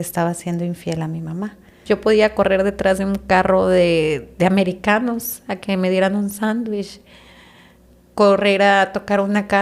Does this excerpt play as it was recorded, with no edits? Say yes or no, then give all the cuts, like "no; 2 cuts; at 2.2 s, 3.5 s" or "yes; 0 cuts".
no; 1 cut; at 1.8 s